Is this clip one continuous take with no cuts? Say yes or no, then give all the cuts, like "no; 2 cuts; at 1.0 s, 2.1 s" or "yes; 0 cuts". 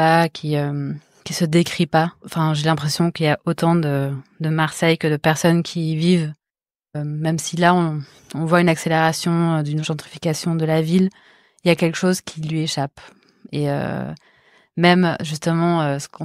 no; 1 cut; at 6.9 s